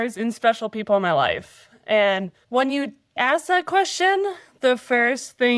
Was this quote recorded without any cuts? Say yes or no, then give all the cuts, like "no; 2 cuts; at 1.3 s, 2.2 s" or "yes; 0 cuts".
no; 2 cuts; at 2.4 s, 3.2 s